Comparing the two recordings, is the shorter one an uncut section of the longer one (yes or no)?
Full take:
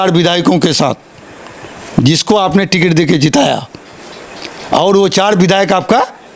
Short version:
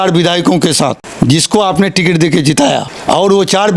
no